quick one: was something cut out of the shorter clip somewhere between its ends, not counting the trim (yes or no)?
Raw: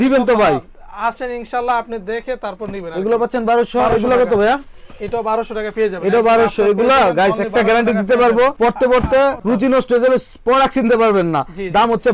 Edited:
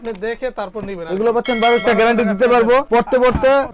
yes